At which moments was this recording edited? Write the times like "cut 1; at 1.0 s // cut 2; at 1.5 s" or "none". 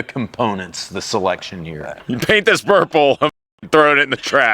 cut 1; at 1.9 s